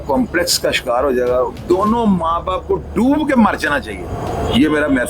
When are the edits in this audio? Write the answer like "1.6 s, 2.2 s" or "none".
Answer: 1.6 s